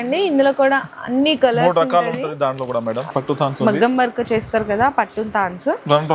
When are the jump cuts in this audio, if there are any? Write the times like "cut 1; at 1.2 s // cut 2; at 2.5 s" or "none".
cut 1; at 3.1 s